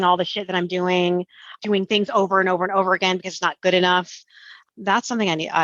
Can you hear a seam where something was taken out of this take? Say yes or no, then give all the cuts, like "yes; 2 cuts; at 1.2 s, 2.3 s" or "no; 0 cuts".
yes; 1 cut; at 1.6 s